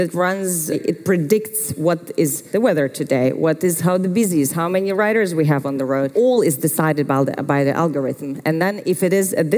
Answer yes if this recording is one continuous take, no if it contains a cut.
no